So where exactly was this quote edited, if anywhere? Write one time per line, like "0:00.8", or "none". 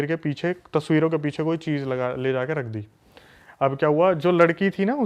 none